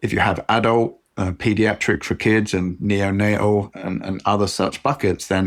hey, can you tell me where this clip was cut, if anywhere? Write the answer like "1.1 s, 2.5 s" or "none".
none